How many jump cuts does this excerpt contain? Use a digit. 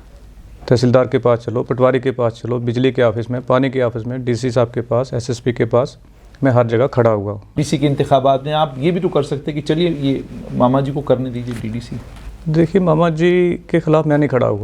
1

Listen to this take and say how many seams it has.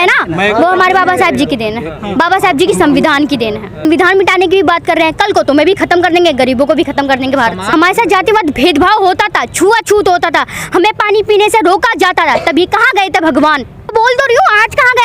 3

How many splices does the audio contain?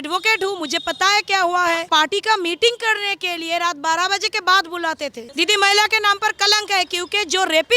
2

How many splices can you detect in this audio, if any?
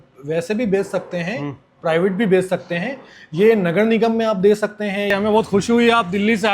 1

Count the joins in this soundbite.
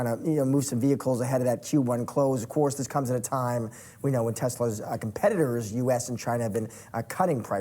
0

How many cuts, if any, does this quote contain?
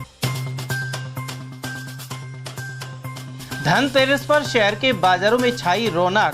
1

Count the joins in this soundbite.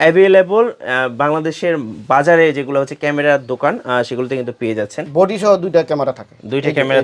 1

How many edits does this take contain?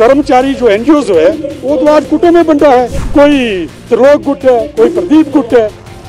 1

